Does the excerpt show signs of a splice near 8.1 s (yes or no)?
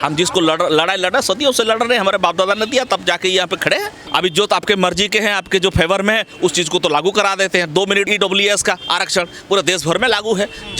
yes